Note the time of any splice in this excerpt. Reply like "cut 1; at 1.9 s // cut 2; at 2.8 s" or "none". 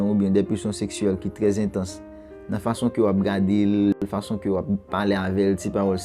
cut 1; at 4.0 s